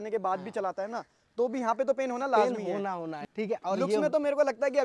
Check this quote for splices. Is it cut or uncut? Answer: cut